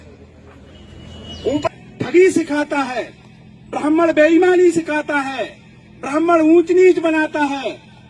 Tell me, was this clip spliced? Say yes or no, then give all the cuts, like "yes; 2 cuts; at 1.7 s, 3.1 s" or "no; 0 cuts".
yes; 1 cut; at 1.7 s